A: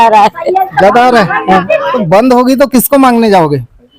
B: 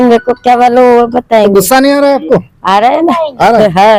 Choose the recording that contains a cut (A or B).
A